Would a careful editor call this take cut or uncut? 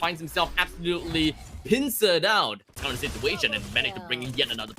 cut